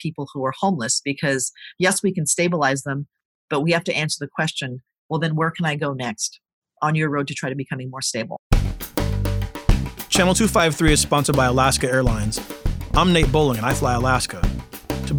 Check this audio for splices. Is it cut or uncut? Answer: cut